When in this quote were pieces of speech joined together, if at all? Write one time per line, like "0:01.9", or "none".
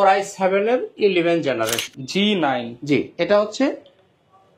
0:01.8